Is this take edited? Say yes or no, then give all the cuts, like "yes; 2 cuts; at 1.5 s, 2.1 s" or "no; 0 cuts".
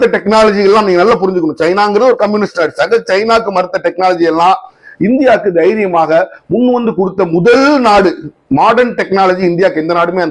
no; 0 cuts